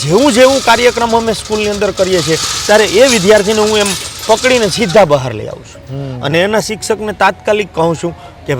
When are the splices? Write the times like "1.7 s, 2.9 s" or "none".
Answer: none